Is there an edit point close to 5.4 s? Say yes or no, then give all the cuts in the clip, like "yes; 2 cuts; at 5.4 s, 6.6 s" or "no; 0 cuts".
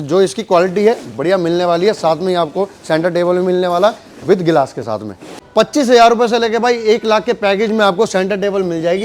yes; 1 cut; at 5.4 s